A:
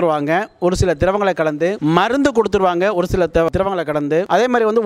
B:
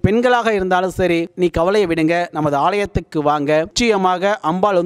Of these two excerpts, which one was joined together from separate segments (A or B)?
B